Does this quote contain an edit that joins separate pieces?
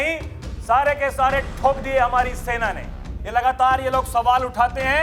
yes; 1 cut; at 3.2 s

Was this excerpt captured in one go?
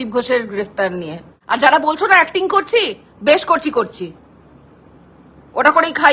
no; 1 cut; at 1.3 s

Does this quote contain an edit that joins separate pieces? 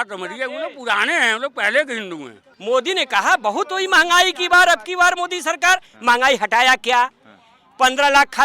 yes; 1 cut; at 2.5 s

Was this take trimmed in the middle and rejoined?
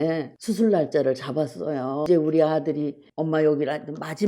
yes; 1 cut; at 2.0 s

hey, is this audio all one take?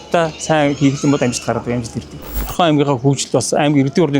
no; 1 cut; at 2.4 s

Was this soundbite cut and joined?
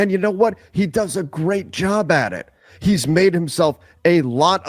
no; 0 cuts

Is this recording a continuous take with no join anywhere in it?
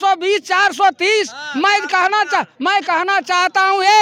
yes; 0 cuts

